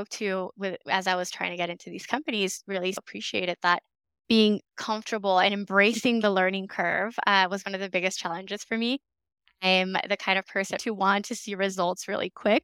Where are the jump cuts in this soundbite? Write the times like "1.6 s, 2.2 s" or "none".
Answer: 3.0 s, 4.1 s, 10.8 s